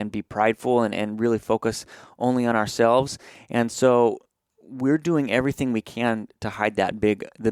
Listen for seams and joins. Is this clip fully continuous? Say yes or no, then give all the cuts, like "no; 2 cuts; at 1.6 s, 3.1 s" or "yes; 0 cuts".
yes; 0 cuts